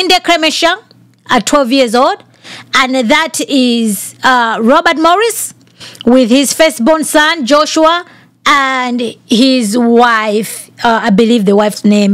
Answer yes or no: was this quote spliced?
no